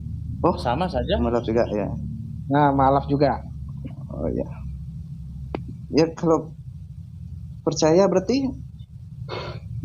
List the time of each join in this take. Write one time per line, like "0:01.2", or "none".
none

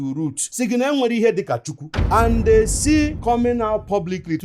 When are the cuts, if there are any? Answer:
none

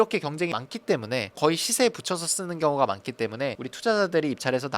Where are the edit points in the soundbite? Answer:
0:01.3

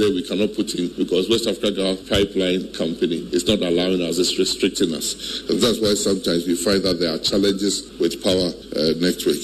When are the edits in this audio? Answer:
0:00.9
0:02.0
0:03.2
0:08.2

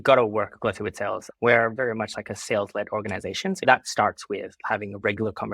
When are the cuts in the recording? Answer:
0:03.6

